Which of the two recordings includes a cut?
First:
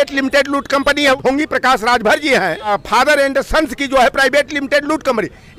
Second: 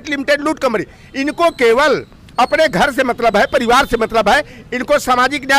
first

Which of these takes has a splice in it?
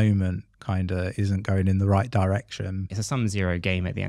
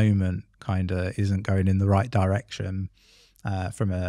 first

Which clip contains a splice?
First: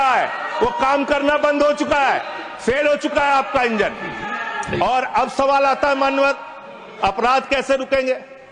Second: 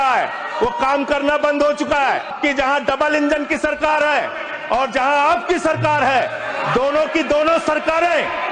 second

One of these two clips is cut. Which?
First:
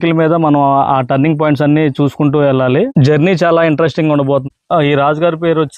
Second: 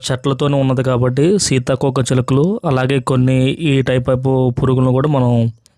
first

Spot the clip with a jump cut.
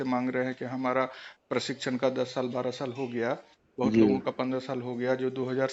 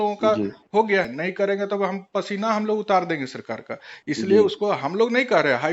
second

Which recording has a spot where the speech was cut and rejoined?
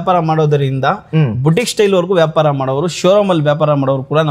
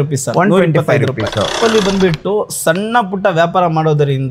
second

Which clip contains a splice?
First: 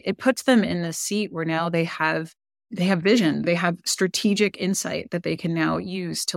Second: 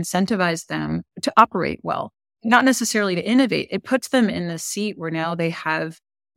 second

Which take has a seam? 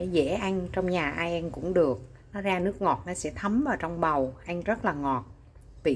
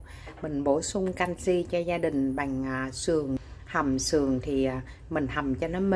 second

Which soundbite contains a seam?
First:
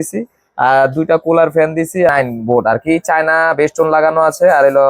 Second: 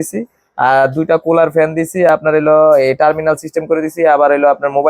first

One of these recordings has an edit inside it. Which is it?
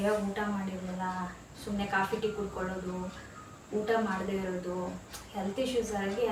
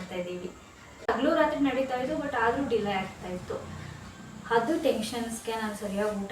second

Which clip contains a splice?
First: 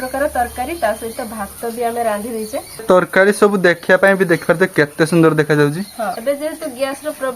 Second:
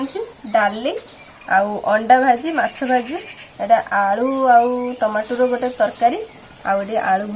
first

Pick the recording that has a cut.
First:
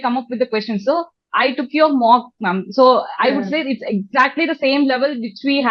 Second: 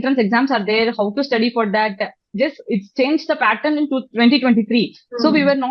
second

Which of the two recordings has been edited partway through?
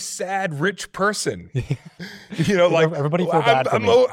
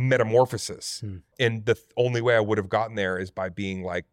second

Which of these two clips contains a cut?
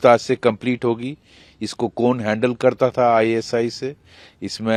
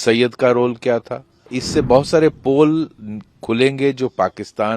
second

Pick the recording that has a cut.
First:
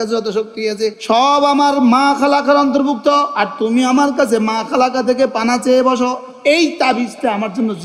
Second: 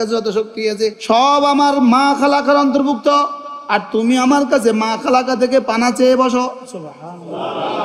first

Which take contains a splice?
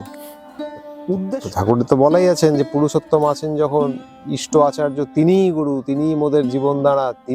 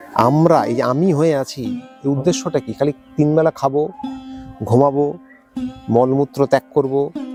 first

